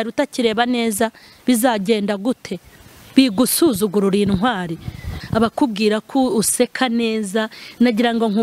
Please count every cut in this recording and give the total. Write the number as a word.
one